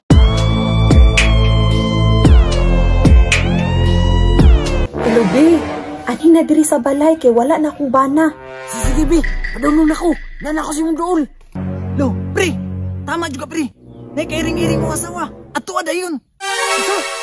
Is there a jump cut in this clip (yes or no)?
yes